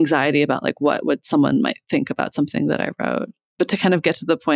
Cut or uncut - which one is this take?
cut